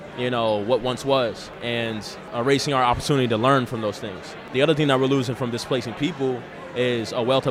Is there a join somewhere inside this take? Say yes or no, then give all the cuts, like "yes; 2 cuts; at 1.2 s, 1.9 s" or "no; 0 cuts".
yes; 2 cuts; at 1.7 s, 4.4 s